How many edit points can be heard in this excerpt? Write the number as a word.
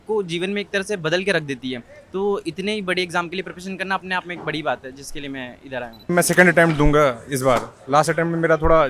one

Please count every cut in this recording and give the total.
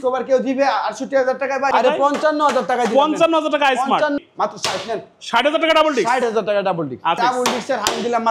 three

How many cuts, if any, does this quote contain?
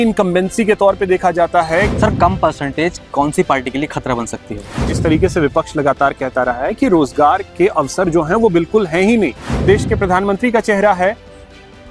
three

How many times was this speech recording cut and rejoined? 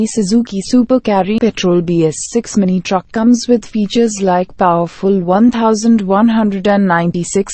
one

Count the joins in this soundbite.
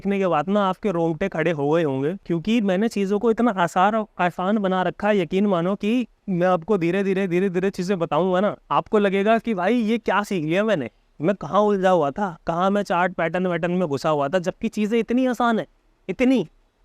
three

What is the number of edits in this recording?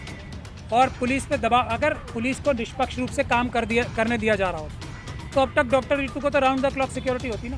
zero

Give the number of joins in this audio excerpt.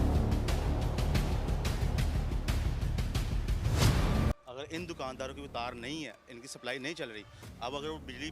one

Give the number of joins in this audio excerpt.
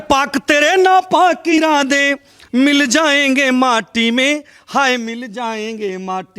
one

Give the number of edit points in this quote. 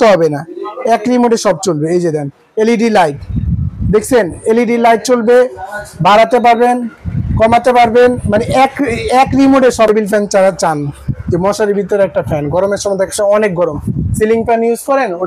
one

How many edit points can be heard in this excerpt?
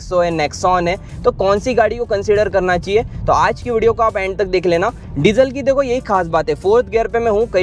zero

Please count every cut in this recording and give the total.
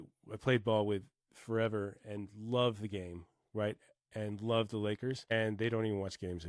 one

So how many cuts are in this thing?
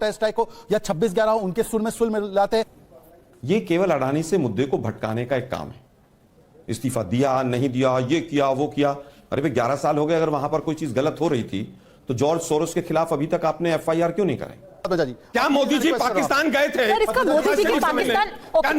two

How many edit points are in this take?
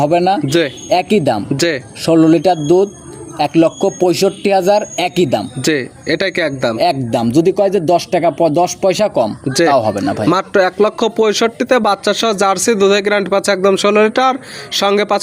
zero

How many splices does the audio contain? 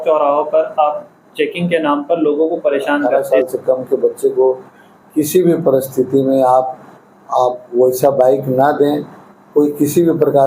one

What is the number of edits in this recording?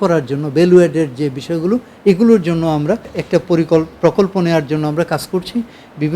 one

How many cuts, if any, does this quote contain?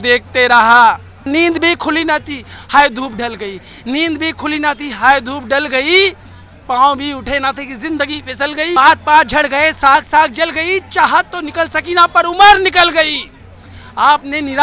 two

